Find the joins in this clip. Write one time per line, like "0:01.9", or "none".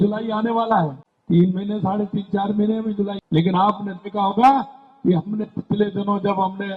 0:01.1
0:03.2